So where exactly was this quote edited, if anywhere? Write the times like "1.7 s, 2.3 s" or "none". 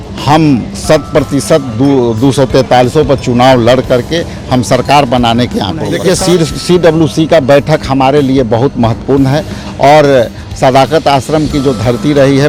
5.9 s